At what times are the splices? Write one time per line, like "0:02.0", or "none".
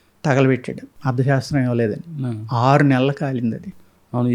none